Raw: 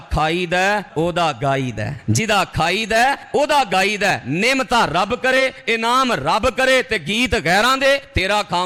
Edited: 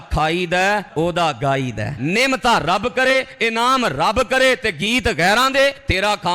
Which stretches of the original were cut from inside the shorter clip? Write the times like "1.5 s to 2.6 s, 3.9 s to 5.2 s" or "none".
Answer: 2.0 s to 4.2 s